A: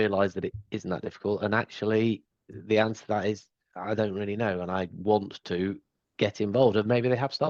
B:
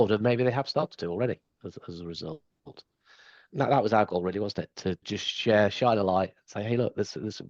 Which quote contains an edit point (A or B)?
B